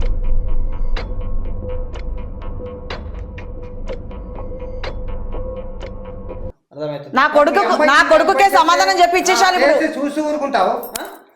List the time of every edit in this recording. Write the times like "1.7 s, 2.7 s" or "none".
6.6 s